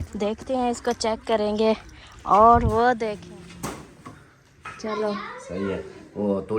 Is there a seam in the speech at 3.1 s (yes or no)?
yes